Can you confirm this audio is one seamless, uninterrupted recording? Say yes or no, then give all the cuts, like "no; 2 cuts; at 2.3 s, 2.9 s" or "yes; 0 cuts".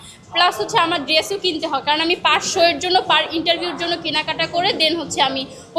yes; 0 cuts